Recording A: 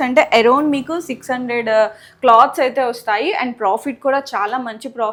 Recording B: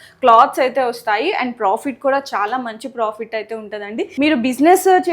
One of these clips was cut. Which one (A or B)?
B